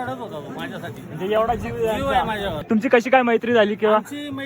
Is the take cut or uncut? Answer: cut